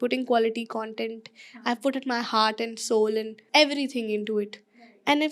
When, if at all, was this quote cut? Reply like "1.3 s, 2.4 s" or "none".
3.4 s